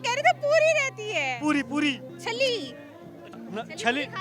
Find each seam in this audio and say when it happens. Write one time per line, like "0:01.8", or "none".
0:02.1